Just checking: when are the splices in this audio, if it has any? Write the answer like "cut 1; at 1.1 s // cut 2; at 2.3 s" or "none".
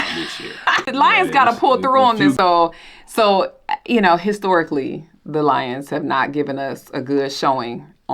cut 1; at 0.9 s // cut 2; at 2.4 s